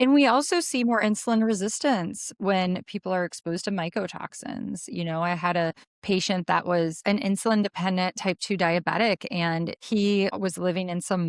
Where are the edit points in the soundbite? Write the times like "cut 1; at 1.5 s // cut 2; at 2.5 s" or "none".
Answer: cut 1; at 5.9 s // cut 2; at 7.0 s // cut 3; at 9.8 s // cut 4; at 10.3 s